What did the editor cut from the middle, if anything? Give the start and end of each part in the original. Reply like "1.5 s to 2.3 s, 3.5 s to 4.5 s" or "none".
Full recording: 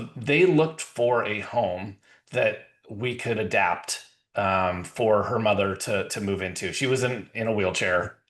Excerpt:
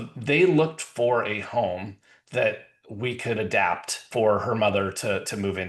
4.0 s to 4.9 s